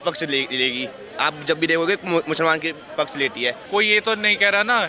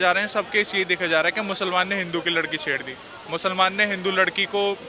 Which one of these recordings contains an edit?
first; 1 cut; at 3.6 s

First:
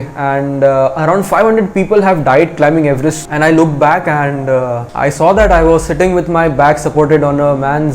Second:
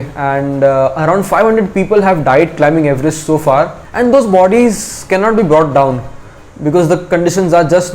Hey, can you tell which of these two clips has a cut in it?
first; 1 cut; at 3.2 s

